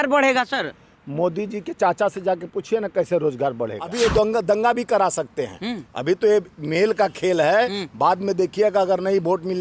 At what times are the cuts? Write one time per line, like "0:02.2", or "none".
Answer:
0:03.9